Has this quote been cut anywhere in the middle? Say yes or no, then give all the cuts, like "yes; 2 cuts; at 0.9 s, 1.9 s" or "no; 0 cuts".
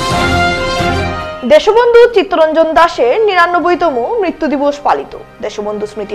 yes; 1 cut; at 1.0 s